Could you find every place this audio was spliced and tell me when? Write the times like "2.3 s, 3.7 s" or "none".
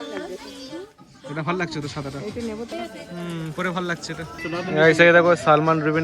2.7 s, 4.4 s